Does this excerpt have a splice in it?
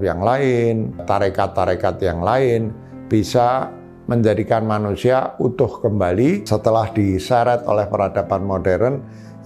yes; 2 cuts; at 1.0 s, 6.4 s

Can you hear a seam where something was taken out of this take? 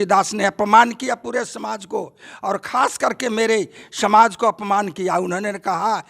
no; 0 cuts

